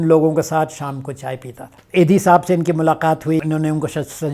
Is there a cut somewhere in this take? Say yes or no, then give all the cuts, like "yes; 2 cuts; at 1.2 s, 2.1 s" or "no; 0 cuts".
yes; 2 cuts; at 1.8 s, 3.4 s